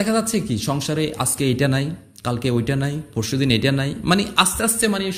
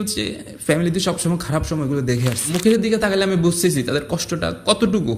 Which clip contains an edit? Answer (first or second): second